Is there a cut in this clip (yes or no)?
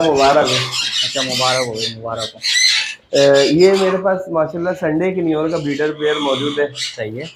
no